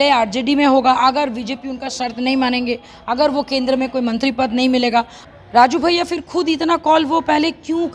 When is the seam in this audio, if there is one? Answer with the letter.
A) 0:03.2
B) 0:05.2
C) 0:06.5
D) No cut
B